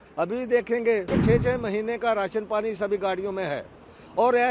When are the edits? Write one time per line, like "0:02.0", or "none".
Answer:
0:01.1